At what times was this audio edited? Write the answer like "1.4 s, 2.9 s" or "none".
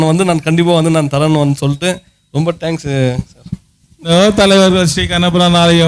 4.1 s

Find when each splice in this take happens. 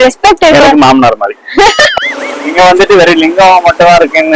1.9 s

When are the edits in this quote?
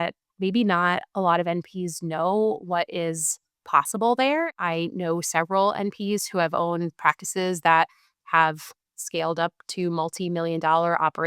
4.5 s

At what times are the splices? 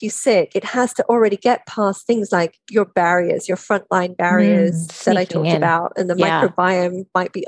none

